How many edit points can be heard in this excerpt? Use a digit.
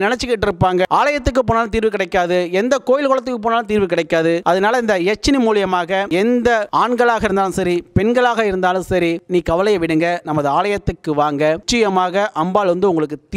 4